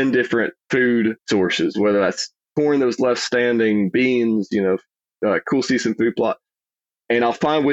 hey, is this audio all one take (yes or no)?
no